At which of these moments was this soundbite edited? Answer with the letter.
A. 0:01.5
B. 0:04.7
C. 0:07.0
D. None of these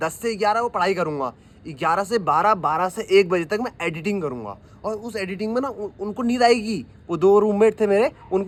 D